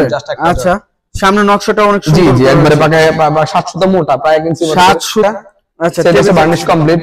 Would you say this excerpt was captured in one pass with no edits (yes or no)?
no